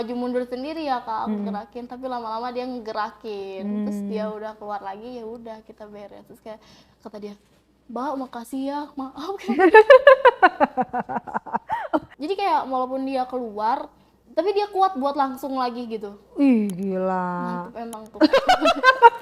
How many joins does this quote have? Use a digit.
1